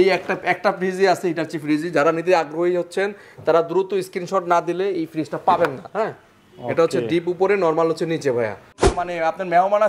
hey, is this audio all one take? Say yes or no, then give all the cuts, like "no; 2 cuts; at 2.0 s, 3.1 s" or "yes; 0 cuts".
no; 1 cut; at 8.9 s